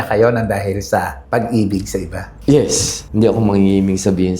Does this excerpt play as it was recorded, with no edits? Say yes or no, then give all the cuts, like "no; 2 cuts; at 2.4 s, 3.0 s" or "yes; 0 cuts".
no; 1 cut; at 3.1 s